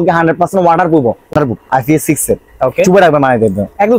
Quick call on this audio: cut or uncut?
cut